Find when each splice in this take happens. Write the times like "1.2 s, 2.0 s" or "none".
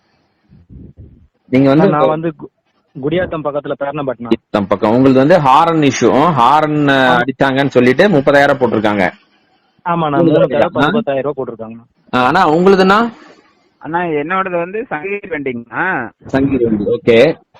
none